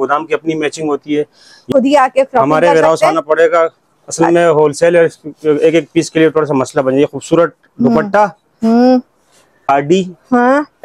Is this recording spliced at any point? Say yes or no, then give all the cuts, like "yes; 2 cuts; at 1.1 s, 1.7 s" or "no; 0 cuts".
yes; 2 cuts; at 1.7 s, 9.6 s